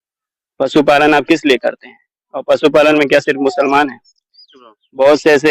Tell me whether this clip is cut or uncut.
uncut